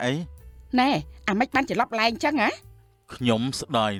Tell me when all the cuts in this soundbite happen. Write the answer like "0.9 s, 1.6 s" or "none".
none